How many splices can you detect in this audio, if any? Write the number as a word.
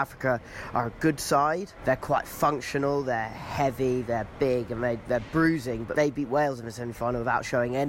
two